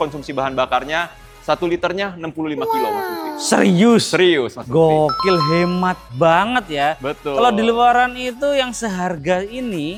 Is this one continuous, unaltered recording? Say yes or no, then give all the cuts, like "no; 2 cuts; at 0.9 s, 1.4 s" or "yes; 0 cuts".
yes; 0 cuts